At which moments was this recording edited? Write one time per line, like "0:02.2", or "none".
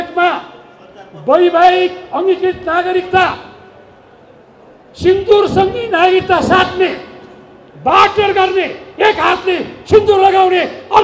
none